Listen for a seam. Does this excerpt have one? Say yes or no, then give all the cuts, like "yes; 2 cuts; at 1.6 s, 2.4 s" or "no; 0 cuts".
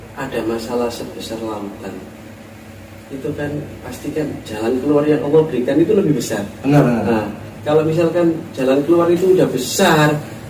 no; 0 cuts